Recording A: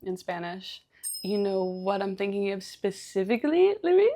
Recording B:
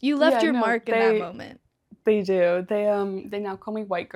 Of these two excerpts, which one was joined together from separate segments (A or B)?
A